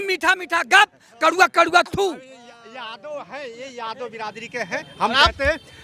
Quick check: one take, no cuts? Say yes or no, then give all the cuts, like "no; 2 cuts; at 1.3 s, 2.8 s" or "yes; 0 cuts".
yes; 0 cuts